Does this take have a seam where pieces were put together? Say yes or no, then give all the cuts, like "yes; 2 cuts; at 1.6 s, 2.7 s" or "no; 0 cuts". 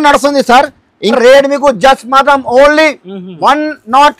yes; 1 cut; at 1.2 s